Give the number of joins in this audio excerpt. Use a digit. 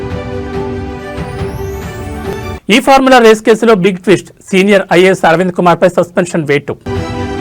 1